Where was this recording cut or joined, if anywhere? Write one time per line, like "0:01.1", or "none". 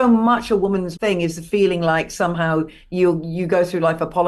0:00.9